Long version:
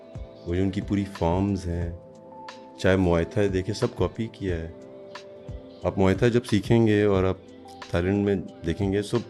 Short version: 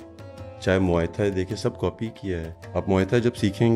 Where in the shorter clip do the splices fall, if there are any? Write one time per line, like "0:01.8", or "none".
0:02.6

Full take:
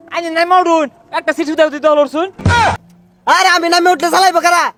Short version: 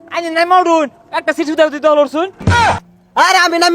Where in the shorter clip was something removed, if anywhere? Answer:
0:02.6

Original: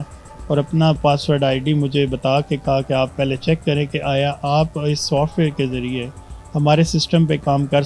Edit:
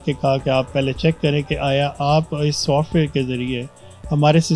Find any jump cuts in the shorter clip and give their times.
none

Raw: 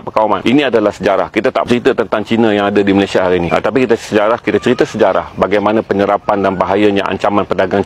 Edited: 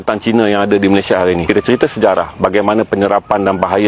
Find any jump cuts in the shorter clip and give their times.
0:01.4

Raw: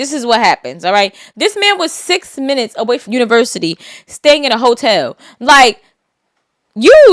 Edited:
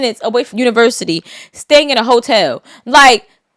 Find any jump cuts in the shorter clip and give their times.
none

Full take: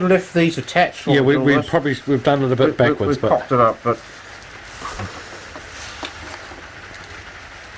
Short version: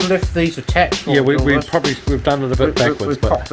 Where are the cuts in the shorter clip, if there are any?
none

